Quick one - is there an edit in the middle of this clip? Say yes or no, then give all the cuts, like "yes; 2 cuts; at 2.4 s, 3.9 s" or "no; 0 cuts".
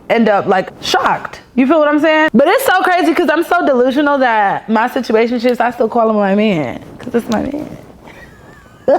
yes; 1 cut; at 2.3 s